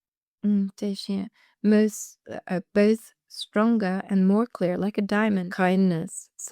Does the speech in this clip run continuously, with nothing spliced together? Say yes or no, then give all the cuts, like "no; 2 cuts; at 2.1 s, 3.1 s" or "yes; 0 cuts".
no; 1 cut; at 5.5 s